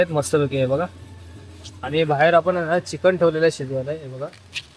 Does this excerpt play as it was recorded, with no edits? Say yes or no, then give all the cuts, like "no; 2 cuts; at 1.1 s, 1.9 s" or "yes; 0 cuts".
yes; 0 cuts